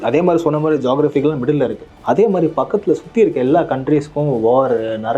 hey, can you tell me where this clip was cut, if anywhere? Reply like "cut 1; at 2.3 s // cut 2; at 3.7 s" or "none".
cut 1; at 1.9 s